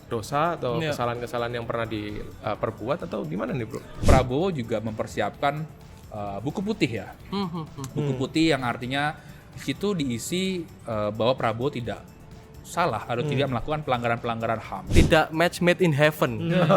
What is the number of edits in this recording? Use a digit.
2